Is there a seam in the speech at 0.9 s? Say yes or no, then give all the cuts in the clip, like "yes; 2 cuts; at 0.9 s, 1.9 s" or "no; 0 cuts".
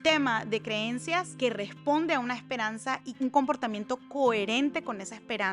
no; 1 cut; at 3.2 s